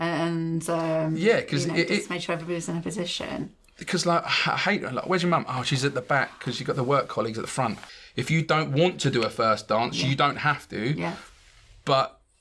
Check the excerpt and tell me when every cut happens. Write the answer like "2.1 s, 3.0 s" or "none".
7.9 s